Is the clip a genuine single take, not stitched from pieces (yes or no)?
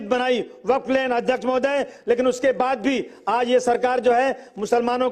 yes